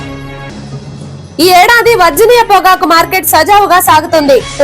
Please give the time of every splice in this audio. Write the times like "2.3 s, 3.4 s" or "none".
none